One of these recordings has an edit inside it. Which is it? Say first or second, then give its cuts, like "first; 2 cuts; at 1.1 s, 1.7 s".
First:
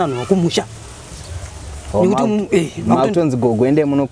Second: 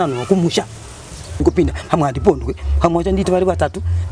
second; 1 cut; at 1.3 s